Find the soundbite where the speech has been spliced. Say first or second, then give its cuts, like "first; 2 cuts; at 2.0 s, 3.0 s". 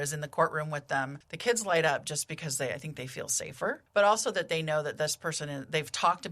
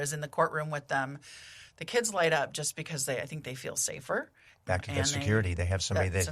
first; 2 cuts; at 1.2 s, 3.8 s